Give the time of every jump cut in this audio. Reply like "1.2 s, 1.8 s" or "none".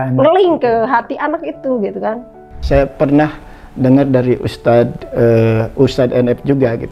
2.5 s